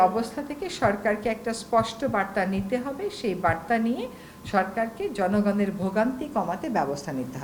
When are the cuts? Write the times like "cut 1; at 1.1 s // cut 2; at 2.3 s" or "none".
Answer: none